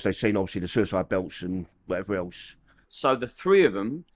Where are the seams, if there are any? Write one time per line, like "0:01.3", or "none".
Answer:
0:02.9